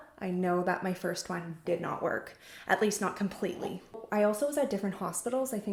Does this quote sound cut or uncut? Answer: uncut